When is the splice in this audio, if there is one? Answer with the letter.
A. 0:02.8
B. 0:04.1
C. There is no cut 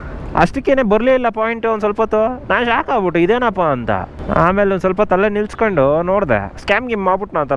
B